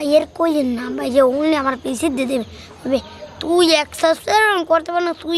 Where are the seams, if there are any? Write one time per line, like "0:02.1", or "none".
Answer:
none